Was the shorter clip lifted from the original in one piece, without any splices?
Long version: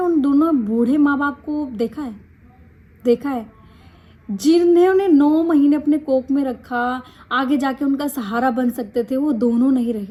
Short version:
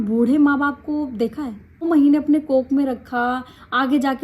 no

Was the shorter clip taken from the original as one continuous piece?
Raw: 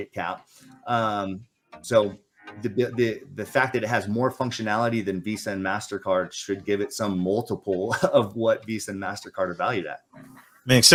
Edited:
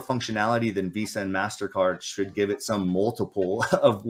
yes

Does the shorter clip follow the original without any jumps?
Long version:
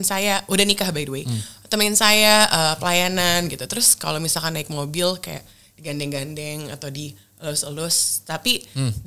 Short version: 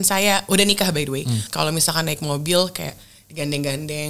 no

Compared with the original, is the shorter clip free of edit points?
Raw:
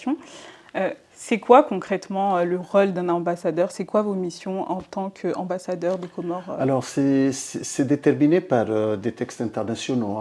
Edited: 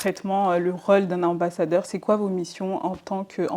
yes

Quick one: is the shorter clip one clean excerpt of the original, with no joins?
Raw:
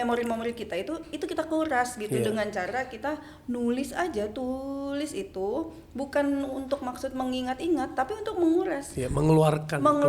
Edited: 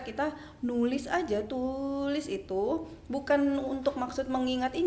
yes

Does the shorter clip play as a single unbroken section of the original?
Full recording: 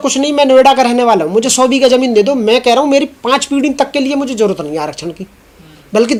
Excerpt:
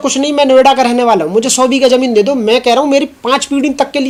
yes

